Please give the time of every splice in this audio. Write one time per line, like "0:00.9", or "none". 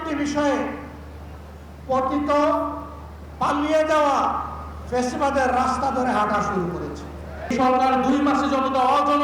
0:07.5

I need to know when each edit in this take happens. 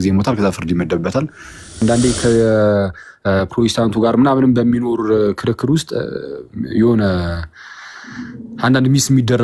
0:01.8

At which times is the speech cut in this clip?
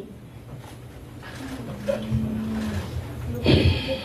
none

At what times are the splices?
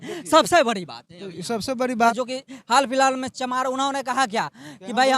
0:02.1

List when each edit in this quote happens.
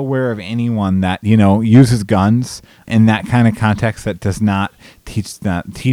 0:02.8

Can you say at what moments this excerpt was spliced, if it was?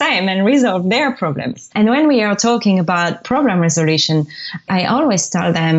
0:01.7
0:03.2
0:04.7

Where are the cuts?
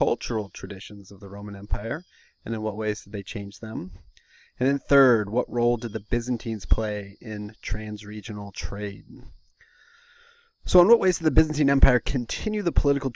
0:11.8

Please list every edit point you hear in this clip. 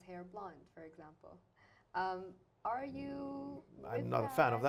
none

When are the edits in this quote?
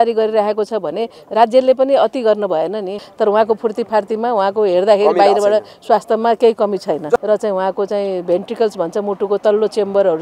0:03.0
0:07.2

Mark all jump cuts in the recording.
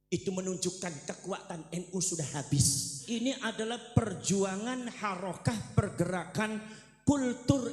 0:03.0

